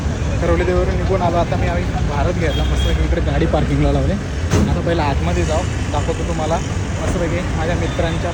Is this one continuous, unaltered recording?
yes; 0 cuts

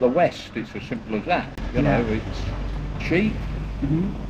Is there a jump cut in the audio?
no; 0 cuts

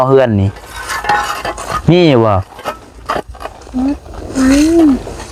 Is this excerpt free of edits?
yes; 0 cuts

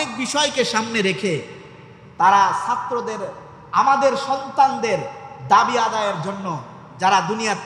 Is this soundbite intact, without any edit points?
yes; 0 cuts

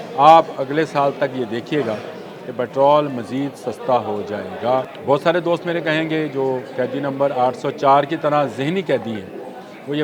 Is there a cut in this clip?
yes; 1 cut; at 4.9 s

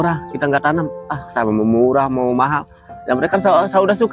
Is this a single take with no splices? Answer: yes; 0 cuts

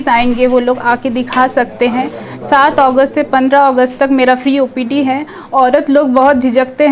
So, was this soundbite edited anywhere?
no; 0 cuts

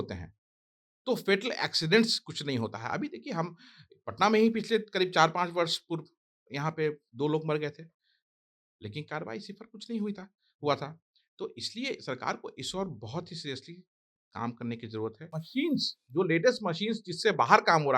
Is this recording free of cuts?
no; 1 cut; at 15.3 s

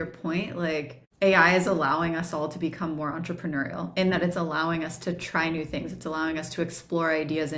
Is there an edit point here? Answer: yes; 1 cut; at 1.0 s

